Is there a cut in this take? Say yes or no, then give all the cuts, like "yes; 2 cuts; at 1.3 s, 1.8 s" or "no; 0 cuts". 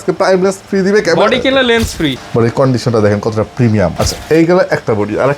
yes; 2 cuts; at 2.2 s, 3.9 s